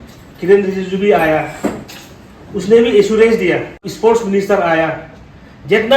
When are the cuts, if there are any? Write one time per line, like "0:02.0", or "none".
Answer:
0:03.9